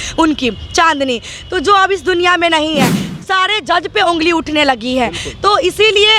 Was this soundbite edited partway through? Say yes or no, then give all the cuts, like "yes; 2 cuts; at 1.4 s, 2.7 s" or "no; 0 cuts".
yes; 1 cut; at 3.1 s